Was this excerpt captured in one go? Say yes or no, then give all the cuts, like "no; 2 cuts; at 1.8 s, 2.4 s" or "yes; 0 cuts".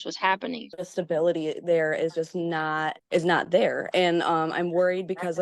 no; 2 cuts; at 0.8 s, 3.0 s